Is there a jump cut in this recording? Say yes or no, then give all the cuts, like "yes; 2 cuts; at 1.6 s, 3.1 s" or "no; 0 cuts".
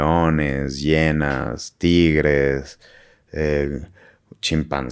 no; 0 cuts